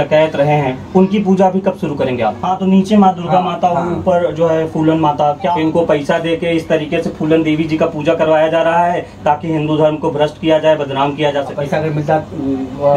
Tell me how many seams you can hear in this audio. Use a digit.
3